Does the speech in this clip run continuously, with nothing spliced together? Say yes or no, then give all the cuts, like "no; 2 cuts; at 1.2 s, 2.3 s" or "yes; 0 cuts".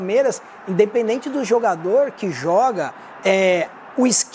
yes; 0 cuts